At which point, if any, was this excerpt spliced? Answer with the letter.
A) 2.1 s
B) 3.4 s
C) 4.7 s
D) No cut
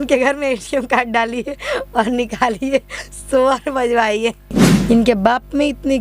C